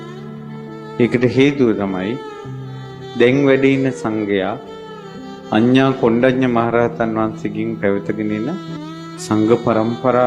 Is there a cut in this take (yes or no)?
yes